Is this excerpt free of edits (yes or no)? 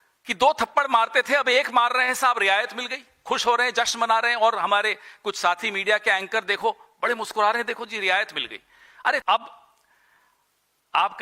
no